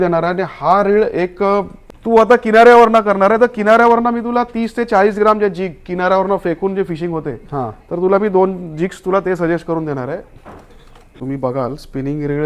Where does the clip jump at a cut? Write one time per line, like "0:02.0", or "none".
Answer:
0:01.8
0:11.1